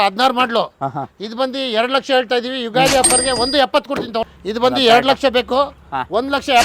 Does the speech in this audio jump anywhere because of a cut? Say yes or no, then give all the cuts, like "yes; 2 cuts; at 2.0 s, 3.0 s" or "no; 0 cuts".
yes; 1 cut; at 4.3 s